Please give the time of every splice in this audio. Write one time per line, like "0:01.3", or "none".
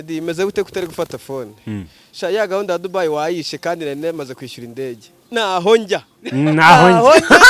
none